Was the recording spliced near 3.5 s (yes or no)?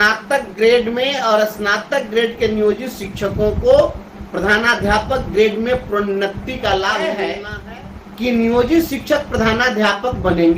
no